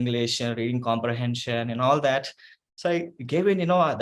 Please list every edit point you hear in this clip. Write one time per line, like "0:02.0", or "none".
none